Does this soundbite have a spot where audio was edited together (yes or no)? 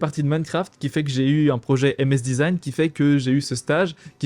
no